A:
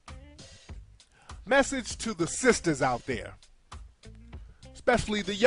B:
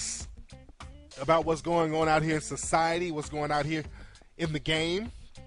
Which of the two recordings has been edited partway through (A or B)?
A